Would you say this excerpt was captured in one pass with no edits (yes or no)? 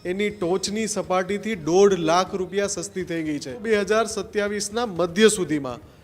no